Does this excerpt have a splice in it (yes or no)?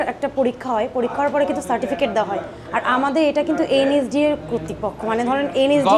no